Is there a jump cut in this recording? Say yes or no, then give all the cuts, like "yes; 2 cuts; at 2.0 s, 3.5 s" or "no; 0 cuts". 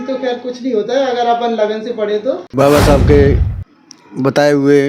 yes; 1 cut; at 2.5 s